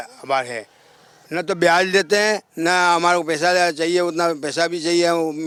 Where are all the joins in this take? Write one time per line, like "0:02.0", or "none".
none